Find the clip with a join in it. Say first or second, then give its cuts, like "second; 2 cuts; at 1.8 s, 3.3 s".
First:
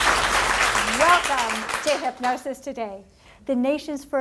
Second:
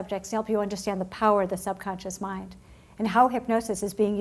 first; 1 cut; at 1.4 s